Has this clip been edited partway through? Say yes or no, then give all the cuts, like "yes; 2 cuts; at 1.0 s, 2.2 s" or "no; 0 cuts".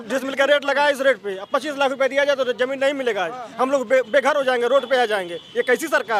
no; 0 cuts